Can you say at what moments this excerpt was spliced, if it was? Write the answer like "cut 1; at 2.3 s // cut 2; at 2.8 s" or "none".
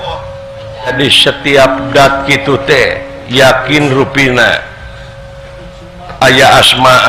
cut 1; at 0.9 s